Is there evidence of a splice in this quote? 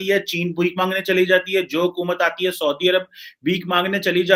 no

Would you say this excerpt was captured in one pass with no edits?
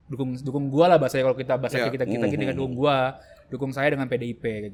yes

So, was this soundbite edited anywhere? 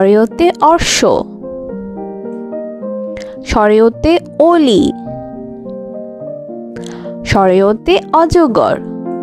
no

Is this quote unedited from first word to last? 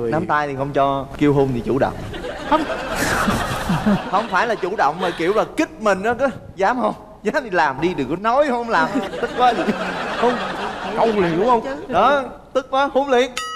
yes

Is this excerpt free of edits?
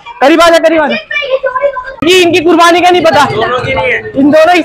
no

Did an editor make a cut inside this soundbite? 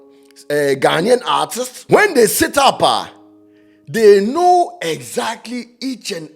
yes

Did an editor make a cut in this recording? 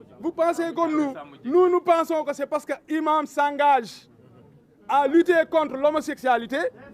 no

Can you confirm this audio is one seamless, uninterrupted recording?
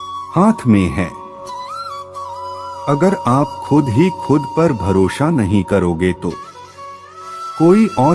no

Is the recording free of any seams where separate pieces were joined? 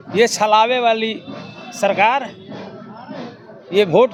yes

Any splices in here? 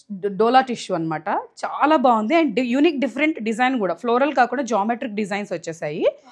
no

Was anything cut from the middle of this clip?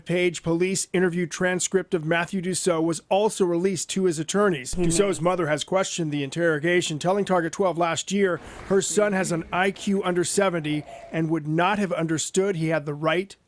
no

